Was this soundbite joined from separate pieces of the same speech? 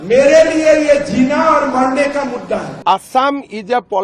yes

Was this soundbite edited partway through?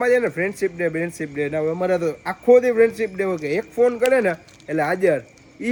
no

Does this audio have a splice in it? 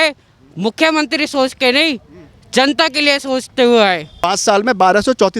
yes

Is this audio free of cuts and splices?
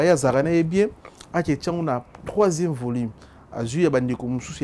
yes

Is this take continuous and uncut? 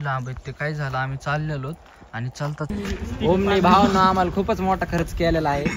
no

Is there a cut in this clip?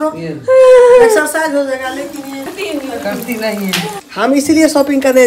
yes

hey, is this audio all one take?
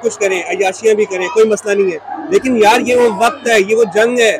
no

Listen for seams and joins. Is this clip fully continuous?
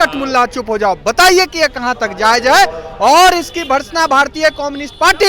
yes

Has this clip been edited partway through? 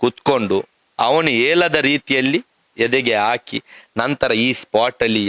no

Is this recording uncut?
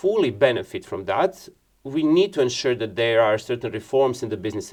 yes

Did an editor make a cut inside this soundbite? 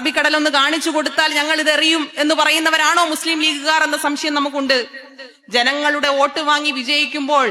no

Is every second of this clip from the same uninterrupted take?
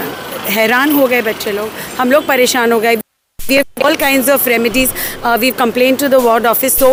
yes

